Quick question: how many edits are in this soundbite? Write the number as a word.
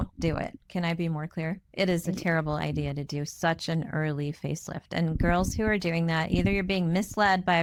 zero